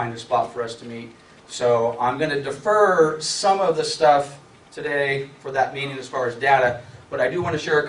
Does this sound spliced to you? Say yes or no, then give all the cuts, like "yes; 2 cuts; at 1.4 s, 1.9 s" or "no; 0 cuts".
yes; 1 cut; at 2.0 s